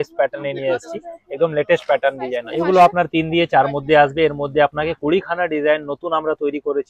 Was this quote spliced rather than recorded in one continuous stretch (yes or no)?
yes